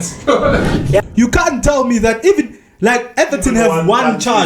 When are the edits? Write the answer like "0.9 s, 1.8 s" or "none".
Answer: 1.0 s